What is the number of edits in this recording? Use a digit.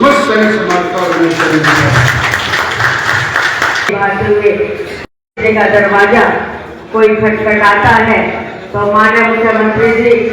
1